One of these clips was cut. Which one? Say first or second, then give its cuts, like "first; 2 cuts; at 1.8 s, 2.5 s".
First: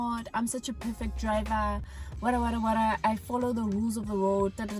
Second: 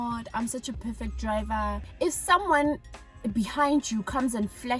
second; 1 cut; at 1.9 s